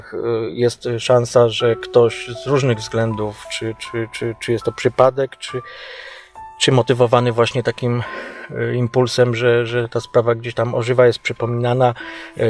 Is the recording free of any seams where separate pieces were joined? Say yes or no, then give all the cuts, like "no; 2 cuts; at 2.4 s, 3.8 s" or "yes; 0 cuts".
yes; 0 cuts